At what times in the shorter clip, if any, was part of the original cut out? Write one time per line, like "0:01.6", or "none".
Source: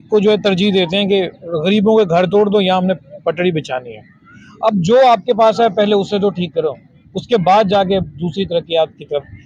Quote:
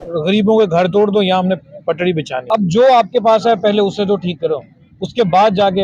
0:02.4